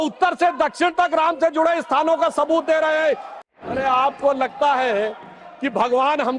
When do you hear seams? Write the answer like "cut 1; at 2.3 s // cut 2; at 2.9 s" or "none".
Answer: cut 1; at 3.3 s